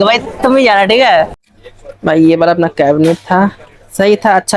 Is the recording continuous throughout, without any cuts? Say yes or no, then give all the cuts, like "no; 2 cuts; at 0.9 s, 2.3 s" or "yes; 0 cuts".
no; 1 cut; at 1.4 s